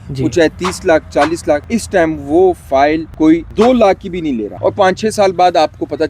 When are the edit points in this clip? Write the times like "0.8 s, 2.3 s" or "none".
4.5 s